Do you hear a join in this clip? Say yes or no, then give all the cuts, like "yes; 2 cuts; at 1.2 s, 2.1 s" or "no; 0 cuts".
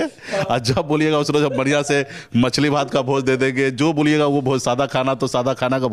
no; 0 cuts